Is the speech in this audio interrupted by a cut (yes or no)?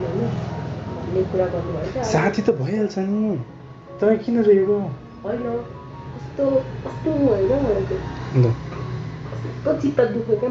no